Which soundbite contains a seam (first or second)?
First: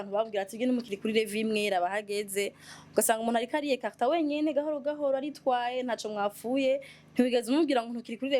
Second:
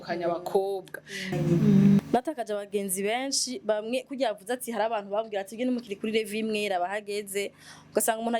second